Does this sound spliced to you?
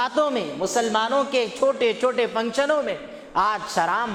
no; 0 cuts

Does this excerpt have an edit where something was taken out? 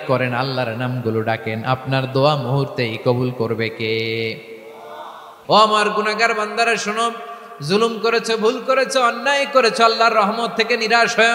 yes; 1 cut; at 5.3 s

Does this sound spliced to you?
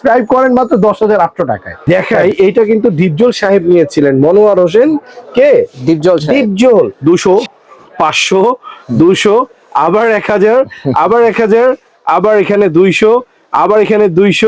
yes; 2 cuts; at 1.7 s, 6.9 s

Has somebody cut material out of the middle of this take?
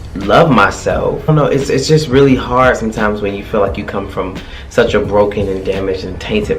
yes; 1 cut; at 1.3 s

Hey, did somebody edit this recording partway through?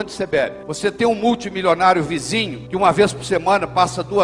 no; 0 cuts

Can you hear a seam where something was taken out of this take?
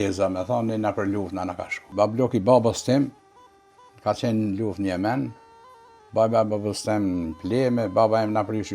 yes; 1 cut; at 1.7 s

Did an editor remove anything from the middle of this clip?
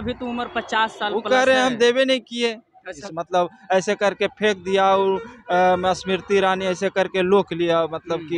yes; 1 cut; at 2.9 s

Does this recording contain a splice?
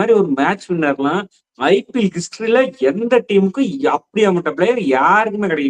no; 0 cuts

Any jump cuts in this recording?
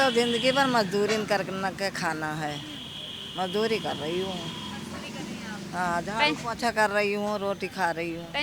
no; 0 cuts

